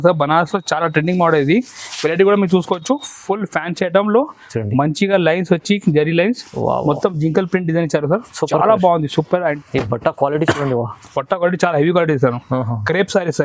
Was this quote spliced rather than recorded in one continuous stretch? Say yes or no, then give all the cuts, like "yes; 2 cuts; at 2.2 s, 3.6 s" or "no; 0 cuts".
yes; 1 cut; at 9.6 s